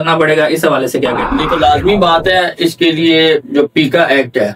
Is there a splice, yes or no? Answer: yes